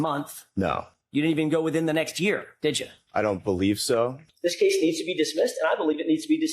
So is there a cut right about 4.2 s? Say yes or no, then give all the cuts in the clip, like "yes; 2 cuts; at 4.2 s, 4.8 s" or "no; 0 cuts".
yes; 1 cut; at 4.2 s